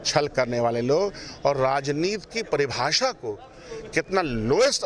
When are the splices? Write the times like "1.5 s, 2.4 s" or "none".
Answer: none